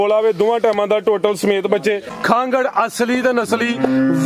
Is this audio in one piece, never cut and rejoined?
no; 1 cut; at 2.1 s

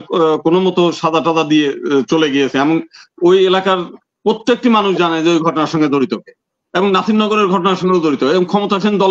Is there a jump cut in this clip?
no; 0 cuts

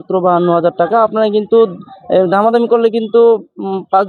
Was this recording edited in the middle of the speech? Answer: no; 0 cuts

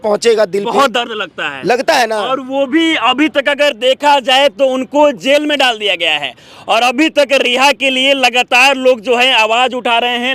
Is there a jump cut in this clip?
no; 0 cuts

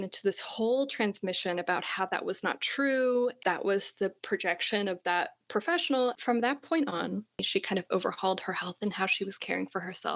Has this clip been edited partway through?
yes; 3 cuts; at 3.4 s, 6.2 s, 7.5 s

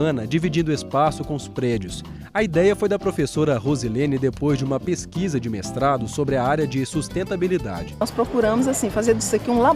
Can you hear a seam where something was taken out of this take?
yes; 1 cut; at 7.8 s

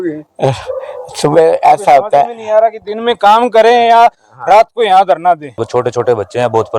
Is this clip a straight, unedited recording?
no; 1 cut; at 5.6 s

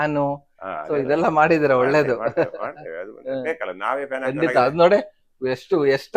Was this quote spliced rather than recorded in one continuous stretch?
no; 0 cuts

